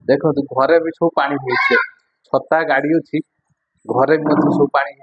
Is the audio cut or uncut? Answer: uncut